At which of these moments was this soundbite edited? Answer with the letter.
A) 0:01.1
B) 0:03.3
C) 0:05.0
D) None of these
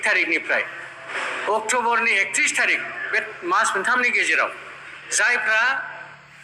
A